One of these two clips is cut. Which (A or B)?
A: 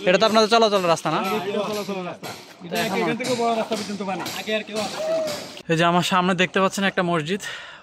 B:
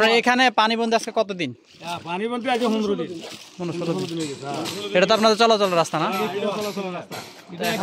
A